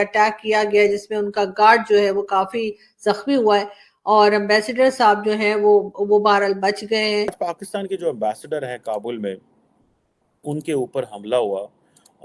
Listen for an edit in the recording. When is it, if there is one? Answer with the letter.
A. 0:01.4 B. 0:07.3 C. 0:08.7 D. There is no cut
B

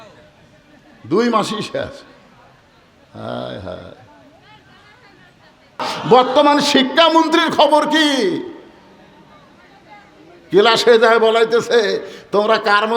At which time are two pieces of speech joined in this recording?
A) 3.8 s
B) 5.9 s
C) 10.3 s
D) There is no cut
B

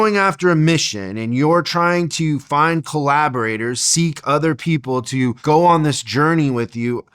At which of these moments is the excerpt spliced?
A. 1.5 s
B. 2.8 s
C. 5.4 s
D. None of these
C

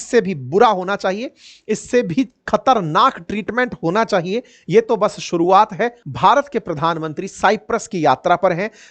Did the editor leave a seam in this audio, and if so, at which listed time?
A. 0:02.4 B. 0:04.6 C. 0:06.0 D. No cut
C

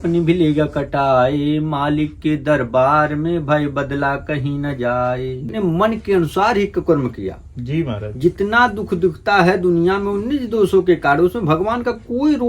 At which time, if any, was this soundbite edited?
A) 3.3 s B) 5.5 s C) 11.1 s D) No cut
B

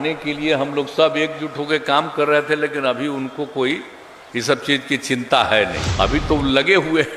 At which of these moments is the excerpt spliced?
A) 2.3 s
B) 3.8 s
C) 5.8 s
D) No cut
C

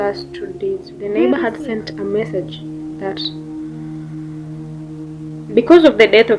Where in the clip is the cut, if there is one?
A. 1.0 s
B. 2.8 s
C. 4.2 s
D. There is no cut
A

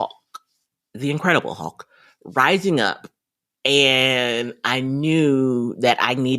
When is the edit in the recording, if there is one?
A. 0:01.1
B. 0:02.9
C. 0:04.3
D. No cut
D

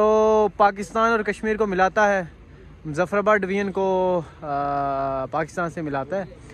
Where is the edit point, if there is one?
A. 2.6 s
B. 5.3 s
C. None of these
C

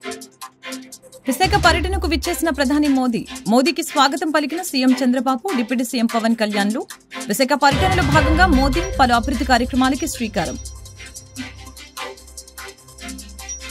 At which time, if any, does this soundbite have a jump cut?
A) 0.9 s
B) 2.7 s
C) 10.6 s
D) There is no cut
A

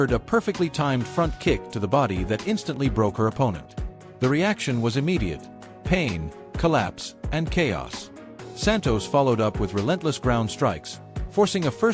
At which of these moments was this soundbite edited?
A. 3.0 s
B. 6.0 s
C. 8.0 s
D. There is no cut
C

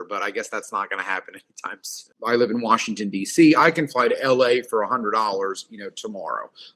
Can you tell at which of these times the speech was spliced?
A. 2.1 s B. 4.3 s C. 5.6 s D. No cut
A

